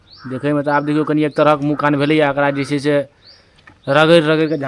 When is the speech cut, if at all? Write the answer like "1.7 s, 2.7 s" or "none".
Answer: none